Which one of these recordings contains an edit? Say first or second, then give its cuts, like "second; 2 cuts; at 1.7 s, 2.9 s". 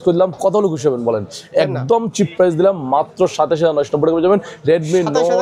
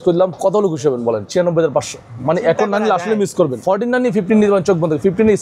second; 2 cuts; at 1.2 s, 3.6 s